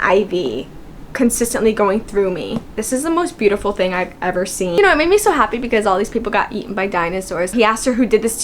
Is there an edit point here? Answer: yes; 3 cuts; at 2.8 s, 4.7 s, 7.5 s

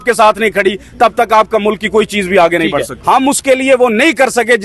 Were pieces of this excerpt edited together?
yes; 1 cut; at 2.9 s

